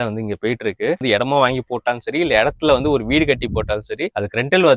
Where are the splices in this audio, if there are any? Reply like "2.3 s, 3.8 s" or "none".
1.0 s